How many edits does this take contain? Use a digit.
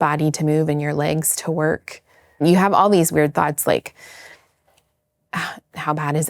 1